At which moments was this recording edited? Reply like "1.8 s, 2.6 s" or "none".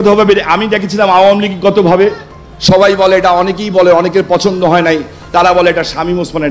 none